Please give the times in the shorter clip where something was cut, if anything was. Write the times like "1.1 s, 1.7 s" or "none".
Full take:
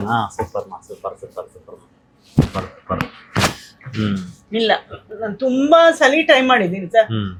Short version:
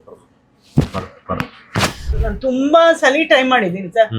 2.1 s